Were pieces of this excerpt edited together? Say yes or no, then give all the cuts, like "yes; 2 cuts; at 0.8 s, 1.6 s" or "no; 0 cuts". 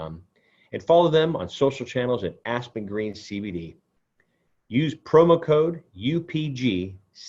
no; 0 cuts